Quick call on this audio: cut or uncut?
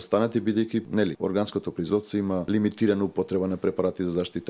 cut